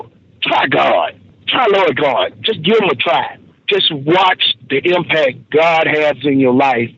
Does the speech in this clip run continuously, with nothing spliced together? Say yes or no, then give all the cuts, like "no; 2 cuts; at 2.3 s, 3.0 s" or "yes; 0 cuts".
no; 1 cut; at 3.5 s